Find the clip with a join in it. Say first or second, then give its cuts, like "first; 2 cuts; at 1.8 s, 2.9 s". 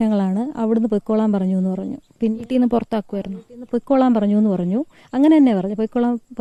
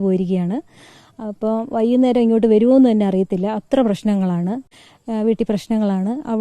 second; 1 cut; at 4.6 s